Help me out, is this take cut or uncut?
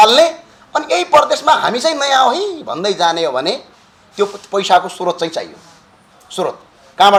uncut